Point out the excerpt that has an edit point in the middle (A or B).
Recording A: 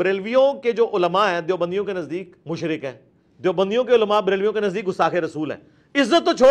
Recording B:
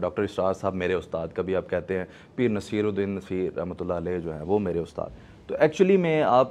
A